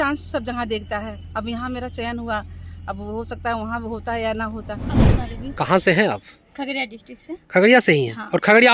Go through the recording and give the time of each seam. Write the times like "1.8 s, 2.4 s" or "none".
5.0 s